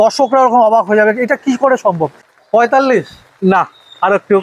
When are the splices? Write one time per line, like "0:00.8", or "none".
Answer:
0:02.1